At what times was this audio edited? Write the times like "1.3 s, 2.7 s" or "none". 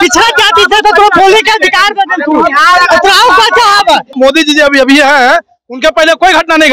4.2 s